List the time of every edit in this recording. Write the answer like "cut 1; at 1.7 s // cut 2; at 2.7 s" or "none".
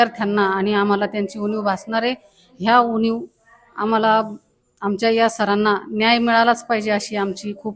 none